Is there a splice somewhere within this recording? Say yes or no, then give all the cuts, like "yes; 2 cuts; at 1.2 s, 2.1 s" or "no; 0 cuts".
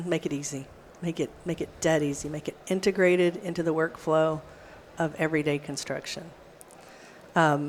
no; 0 cuts